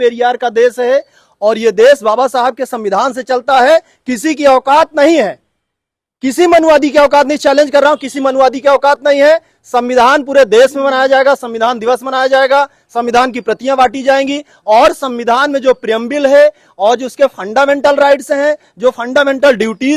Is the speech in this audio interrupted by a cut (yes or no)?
no